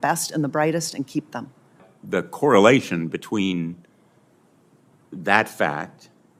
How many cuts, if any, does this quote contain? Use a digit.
0